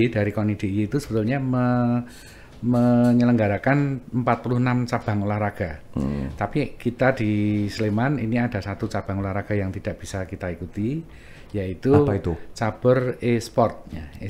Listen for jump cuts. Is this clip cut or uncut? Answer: uncut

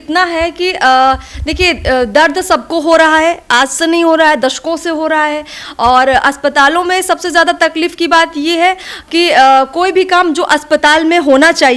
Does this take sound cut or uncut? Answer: uncut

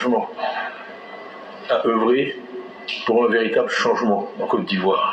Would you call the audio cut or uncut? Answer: uncut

